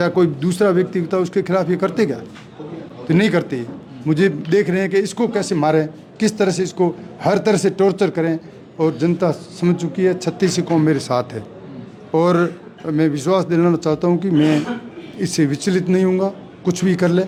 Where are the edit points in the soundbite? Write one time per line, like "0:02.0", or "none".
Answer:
none